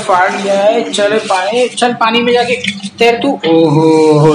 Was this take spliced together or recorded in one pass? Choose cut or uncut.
uncut